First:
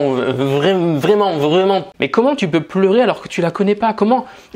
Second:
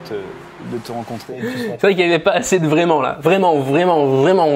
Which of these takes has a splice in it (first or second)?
first